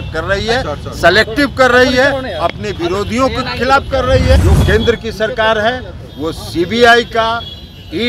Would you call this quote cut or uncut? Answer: cut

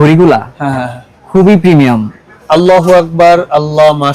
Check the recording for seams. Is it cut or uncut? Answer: cut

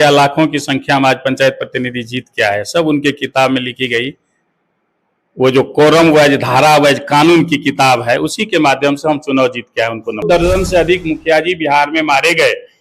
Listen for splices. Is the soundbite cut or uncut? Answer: cut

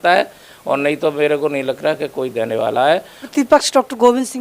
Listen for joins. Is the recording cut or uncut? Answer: cut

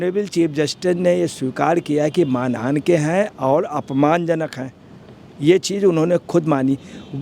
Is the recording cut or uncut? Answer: uncut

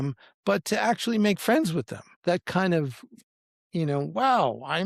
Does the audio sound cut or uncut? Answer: cut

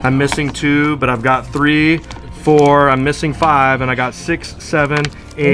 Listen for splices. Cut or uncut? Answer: uncut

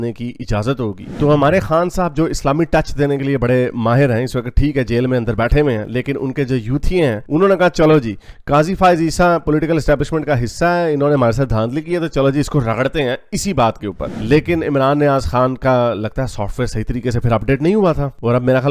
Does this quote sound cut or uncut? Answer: cut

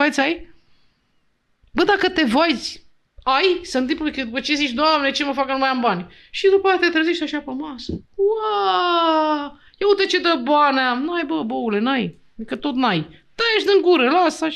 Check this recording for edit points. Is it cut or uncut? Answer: uncut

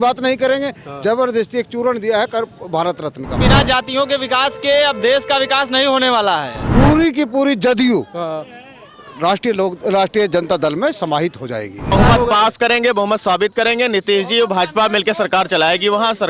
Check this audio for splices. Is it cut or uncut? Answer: cut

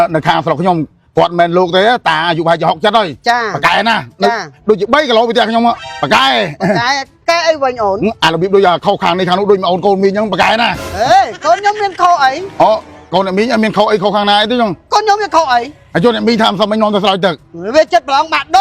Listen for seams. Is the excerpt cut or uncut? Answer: uncut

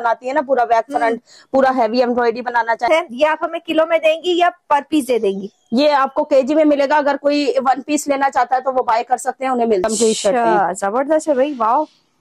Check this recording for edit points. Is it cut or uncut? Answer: cut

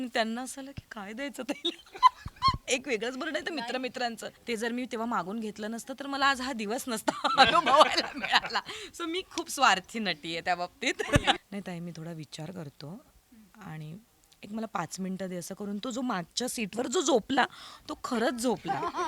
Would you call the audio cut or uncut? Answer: cut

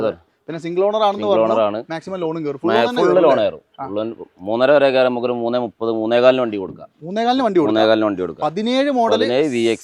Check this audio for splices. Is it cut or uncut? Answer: uncut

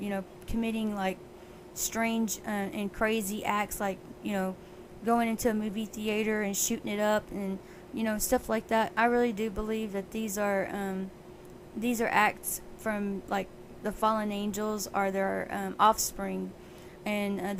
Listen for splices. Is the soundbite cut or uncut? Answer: uncut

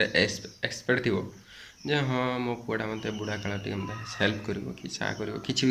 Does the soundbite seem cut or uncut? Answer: uncut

